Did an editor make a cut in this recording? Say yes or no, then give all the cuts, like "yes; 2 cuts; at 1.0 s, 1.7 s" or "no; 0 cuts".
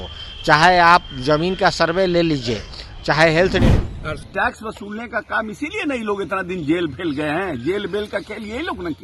yes; 1 cut; at 3.6 s